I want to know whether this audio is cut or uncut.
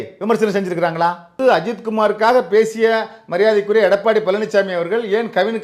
cut